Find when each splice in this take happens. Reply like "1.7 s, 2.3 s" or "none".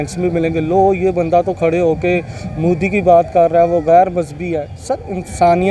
none